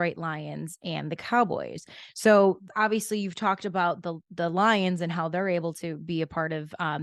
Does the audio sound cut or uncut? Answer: uncut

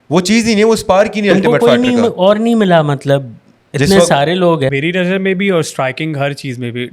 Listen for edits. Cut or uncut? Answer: cut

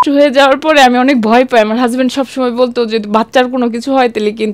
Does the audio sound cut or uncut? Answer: uncut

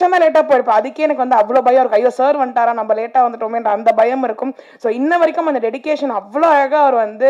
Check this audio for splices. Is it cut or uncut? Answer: uncut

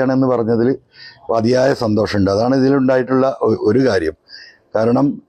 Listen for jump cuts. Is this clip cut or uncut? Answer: uncut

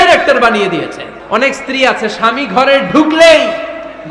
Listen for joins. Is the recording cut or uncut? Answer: cut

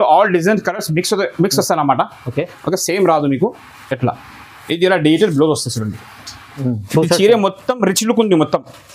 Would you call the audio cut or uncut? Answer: cut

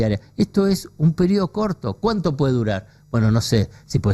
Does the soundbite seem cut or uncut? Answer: uncut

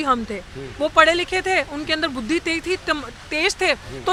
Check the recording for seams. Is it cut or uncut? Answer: uncut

